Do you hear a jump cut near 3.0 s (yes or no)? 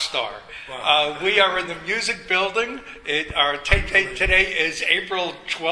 yes